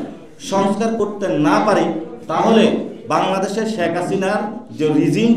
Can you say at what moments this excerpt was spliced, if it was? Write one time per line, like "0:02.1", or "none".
none